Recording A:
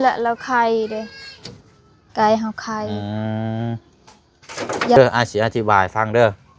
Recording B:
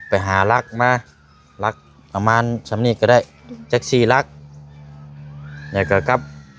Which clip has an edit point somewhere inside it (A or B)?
A